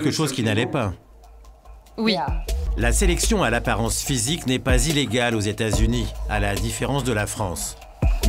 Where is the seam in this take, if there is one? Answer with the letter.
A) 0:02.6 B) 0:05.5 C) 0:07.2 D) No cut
A